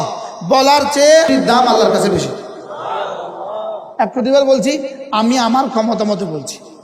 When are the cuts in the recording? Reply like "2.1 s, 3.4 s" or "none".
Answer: 1.3 s, 3.8 s